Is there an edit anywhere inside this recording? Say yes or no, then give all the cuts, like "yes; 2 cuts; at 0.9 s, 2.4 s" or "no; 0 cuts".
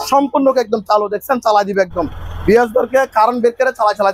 no; 0 cuts